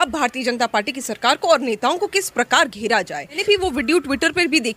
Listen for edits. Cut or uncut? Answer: cut